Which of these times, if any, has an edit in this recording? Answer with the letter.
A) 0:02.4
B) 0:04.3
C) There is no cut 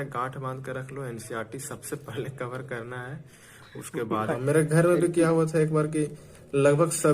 B